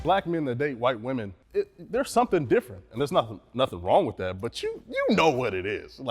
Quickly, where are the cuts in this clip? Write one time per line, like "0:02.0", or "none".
0:01.4